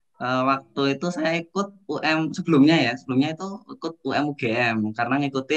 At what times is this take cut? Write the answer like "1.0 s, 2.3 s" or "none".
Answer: none